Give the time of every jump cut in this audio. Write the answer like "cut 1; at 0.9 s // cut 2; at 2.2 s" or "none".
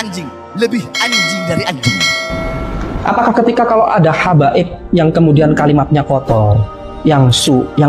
cut 1; at 2.2 s